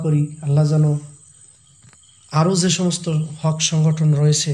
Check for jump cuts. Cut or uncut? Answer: uncut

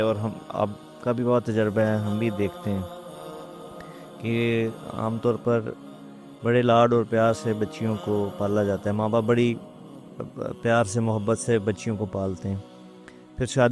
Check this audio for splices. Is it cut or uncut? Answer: cut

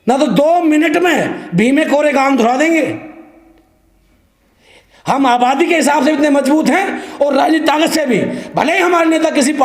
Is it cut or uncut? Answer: uncut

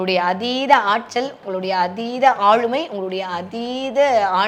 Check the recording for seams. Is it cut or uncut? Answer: uncut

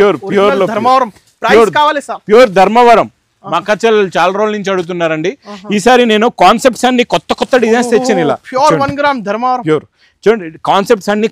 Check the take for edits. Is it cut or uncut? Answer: uncut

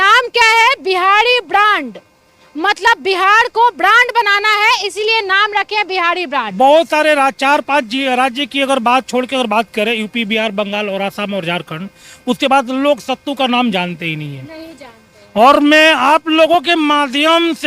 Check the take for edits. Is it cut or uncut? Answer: uncut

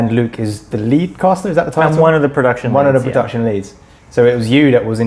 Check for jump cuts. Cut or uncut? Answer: uncut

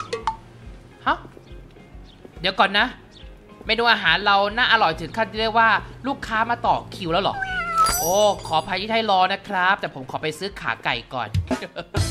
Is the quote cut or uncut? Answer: uncut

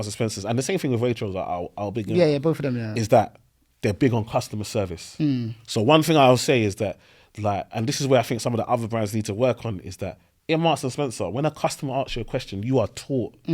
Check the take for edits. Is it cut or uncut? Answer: uncut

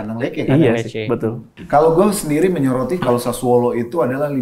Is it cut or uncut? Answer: cut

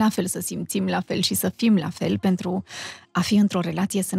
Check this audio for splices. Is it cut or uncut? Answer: uncut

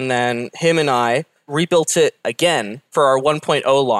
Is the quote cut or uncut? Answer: cut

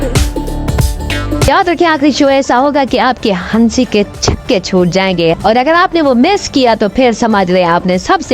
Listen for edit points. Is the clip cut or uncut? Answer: cut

